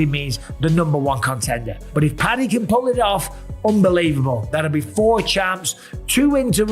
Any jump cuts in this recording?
no; 0 cuts

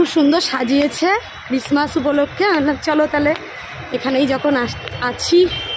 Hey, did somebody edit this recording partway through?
no; 0 cuts

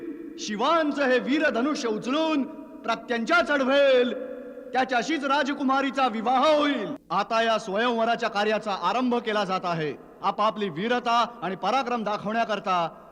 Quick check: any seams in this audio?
yes; 1 cut; at 7.0 s

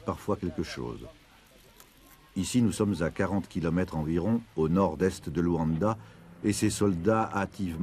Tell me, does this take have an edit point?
no; 0 cuts

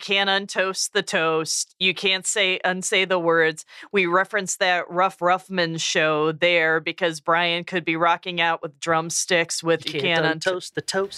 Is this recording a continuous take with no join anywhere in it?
yes; 0 cuts

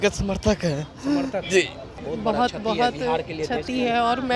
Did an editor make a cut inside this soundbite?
yes; 1 cut; at 1.9 s

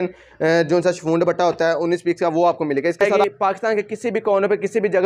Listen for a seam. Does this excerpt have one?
yes; 1 cut; at 3.2 s

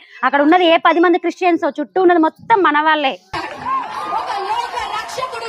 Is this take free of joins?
yes; 0 cuts

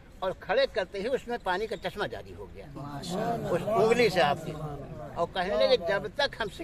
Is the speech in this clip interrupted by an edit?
no; 0 cuts

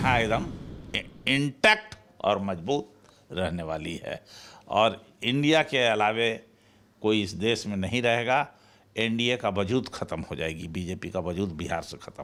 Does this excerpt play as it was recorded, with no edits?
yes; 0 cuts

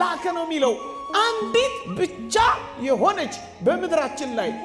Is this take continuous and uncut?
yes; 0 cuts

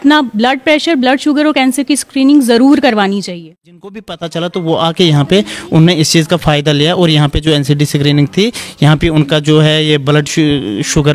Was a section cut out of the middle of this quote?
yes; 1 cut; at 4.2 s

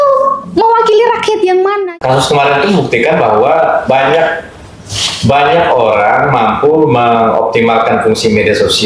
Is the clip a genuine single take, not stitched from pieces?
no; 1 cut; at 1.8 s

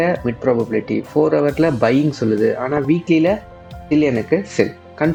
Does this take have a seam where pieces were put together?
no; 0 cuts

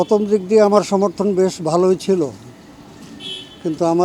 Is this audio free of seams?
yes; 0 cuts

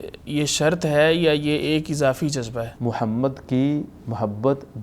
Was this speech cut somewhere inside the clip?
yes; 1 cut; at 2.7 s

